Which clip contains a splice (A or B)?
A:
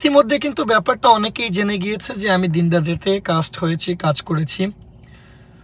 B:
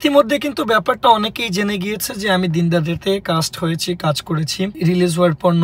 B